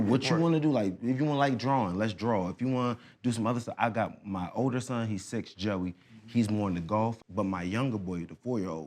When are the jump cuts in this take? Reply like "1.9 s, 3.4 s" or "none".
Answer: 7.2 s